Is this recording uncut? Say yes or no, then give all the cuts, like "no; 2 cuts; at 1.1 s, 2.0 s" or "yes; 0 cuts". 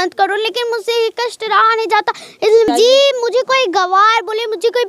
no; 1 cut; at 2.7 s